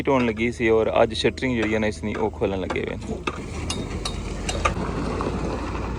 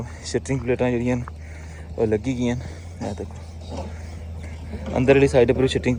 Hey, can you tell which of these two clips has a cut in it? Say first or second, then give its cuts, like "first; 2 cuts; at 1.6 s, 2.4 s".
first; 1 cut; at 4.8 s